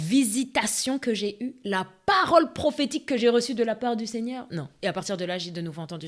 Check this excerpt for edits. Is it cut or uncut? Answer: uncut